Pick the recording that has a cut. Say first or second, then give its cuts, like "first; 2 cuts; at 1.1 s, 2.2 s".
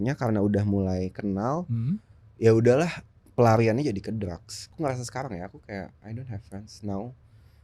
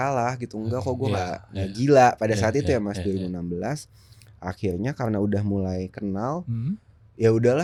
first; 1 cut; at 4.5 s